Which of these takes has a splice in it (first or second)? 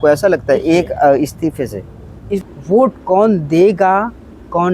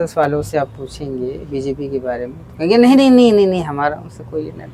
first